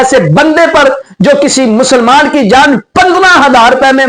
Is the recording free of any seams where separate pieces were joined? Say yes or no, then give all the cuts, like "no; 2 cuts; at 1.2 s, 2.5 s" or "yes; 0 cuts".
yes; 0 cuts